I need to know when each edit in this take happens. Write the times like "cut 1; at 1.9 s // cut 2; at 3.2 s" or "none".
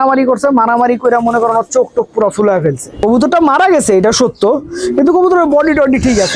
cut 1; at 2.9 s